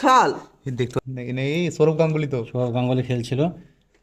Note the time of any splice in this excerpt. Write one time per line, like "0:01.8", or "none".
0:01.0